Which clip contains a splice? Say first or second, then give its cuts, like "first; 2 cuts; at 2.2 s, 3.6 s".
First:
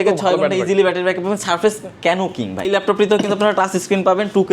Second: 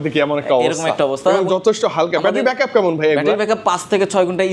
first; 1 cut; at 2.7 s